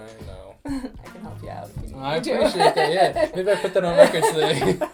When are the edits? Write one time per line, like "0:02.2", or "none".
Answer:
none